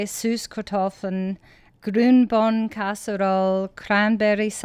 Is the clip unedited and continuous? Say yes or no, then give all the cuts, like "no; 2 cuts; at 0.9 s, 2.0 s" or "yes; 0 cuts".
no; 1 cut; at 1.8 s